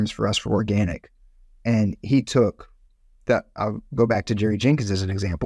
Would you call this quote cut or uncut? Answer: uncut